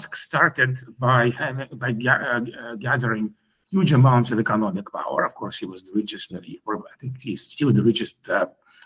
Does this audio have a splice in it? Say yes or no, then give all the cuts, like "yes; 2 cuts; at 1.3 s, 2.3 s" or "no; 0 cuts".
no; 0 cuts